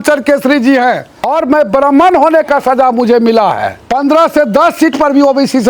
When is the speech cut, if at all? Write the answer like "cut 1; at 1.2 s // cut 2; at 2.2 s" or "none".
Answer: cut 1; at 1.3 s // cut 2; at 3.8 s

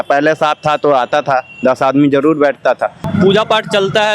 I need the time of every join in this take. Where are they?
cut 1; at 3.0 s

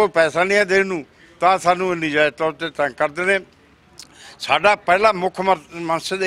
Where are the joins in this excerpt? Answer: none

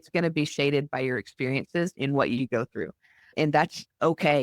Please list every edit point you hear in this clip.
none

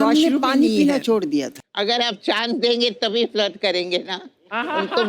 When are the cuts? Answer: cut 1; at 1.6 s

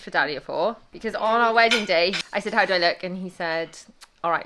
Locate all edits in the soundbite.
cut 1; at 0.9 s // cut 2; at 2.2 s

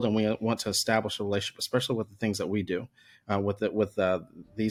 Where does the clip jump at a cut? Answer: none

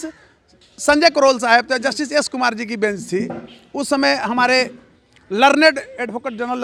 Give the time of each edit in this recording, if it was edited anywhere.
none

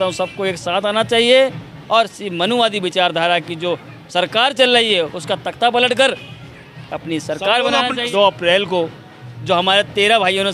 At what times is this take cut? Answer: cut 1; at 8.0 s

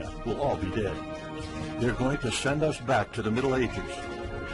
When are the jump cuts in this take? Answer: none

